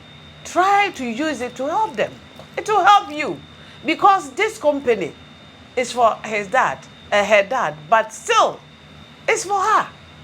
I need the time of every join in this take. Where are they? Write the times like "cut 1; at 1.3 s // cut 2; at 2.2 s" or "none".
none